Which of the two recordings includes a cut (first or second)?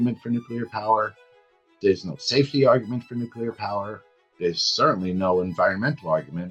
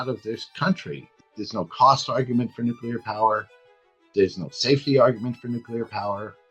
second